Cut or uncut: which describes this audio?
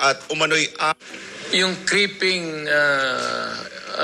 cut